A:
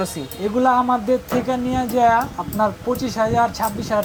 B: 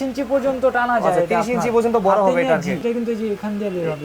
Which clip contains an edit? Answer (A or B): B